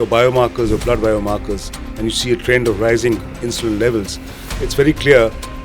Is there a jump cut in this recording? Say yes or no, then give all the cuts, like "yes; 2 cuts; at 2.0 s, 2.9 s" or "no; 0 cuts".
yes; 1 cut; at 3.4 s